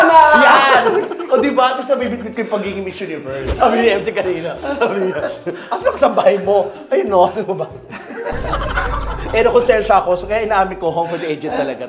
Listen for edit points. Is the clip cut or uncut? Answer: cut